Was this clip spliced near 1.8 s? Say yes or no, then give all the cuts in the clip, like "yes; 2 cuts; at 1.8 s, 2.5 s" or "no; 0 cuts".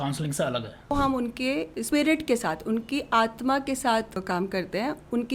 yes; 3 cuts; at 0.9 s, 1.8 s, 4.2 s